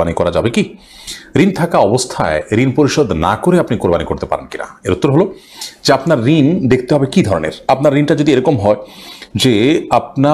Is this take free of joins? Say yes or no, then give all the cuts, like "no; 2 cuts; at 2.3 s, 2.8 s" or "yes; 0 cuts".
yes; 0 cuts